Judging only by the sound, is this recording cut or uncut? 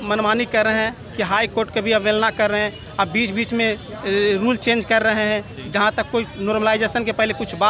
uncut